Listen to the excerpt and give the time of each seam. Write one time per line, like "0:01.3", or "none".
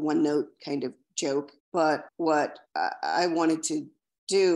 0:02.1